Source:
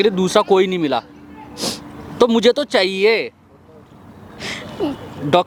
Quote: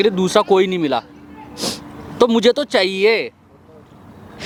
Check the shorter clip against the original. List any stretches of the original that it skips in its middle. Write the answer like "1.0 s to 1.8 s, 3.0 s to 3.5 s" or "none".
none

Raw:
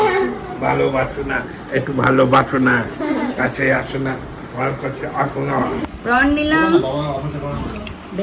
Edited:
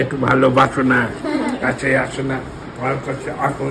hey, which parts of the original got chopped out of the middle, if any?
none

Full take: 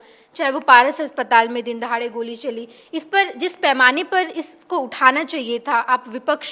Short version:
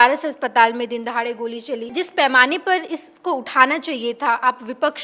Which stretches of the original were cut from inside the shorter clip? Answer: 2.6 s to 3.3 s

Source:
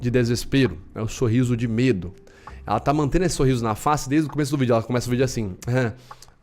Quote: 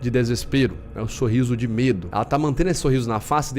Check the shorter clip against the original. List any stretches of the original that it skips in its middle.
2.1 s to 2.6 s

